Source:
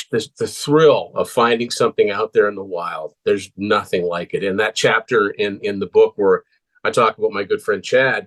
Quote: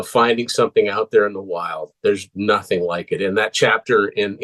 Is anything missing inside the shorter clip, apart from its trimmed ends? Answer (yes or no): no